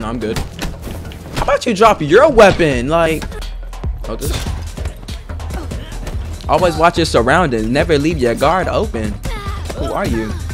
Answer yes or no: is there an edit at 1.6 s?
no